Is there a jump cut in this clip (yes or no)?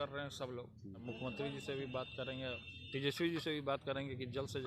yes